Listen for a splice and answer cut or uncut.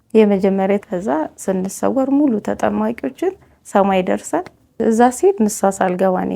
cut